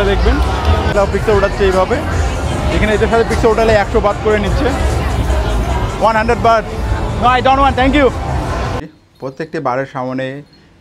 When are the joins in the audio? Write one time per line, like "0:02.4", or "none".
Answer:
0:00.9
0:08.8